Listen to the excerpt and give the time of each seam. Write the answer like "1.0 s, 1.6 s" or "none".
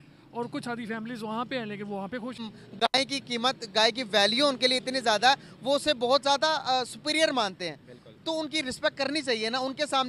2.4 s